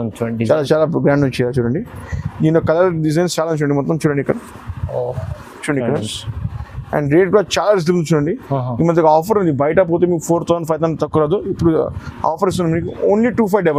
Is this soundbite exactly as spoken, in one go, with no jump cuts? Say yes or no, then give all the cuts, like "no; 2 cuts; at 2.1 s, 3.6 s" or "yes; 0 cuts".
yes; 0 cuts